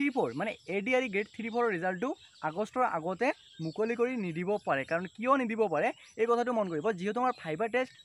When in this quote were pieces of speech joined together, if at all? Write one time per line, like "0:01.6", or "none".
none